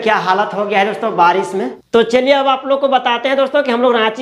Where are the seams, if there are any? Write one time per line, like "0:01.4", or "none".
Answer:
0:01.5